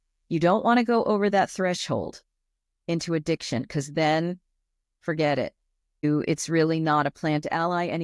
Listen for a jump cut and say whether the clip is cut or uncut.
cut